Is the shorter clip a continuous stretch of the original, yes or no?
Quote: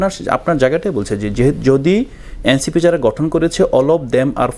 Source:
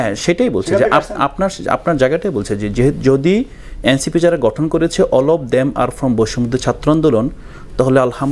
yes